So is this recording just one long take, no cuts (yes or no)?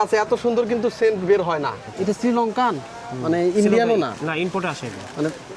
no